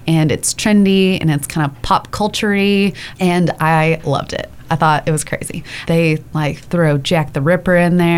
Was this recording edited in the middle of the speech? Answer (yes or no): yes